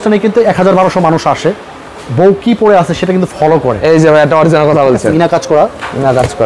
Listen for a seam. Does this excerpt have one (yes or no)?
yes